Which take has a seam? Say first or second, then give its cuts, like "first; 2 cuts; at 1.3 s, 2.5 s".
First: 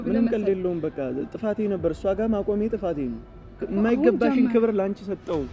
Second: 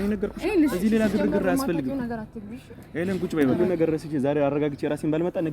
second; 1 cut; at 3.5 s